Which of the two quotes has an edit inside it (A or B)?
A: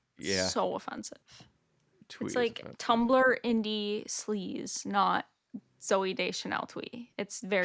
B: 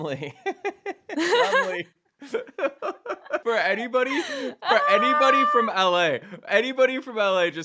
B